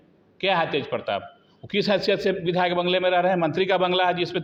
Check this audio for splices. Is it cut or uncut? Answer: uncut